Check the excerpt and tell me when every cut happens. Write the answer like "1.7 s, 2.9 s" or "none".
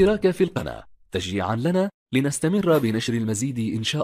none